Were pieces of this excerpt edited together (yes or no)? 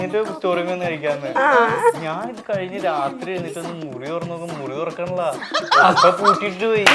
no